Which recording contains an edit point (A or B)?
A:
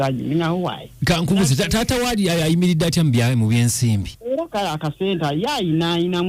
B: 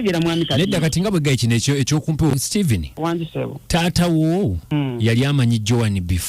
B